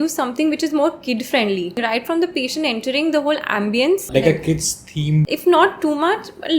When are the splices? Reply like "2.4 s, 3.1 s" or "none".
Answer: 1.8 s, 4.1 s, 5.3 s

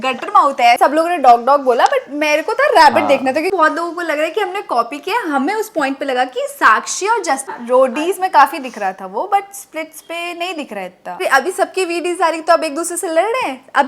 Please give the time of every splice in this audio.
0.8 s, 3.5 s, 7.5 s, 11.2 s

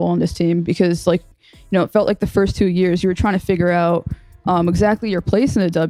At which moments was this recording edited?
none

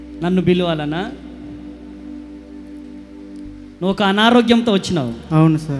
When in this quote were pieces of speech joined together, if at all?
none

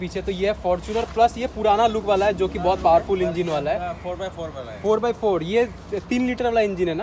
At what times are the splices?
none

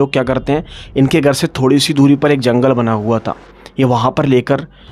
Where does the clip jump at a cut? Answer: none

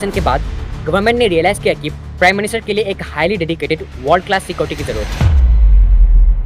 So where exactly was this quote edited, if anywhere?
5.1 s

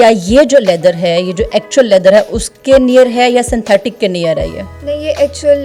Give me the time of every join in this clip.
none

